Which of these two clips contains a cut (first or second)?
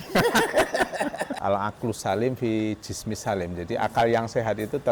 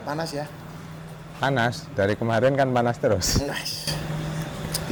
first